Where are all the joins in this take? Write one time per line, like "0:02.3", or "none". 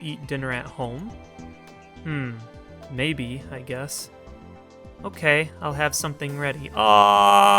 none